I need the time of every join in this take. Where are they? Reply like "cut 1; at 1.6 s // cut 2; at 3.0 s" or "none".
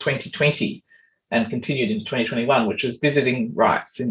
none